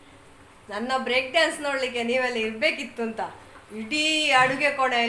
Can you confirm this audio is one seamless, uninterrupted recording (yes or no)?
yes